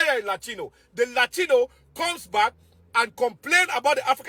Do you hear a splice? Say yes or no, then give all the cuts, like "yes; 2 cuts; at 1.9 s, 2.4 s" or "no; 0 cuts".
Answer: no; 0 cuts